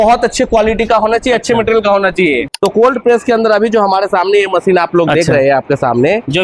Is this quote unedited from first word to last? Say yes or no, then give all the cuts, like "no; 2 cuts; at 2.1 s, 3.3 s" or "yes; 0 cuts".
no; 1 cut; at 2.5 s